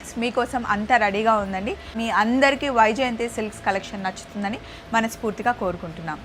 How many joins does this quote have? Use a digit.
1